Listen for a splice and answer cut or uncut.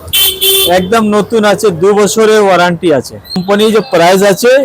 cut